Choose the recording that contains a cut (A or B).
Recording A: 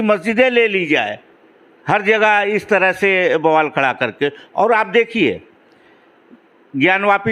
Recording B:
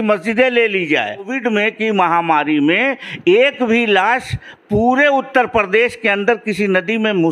B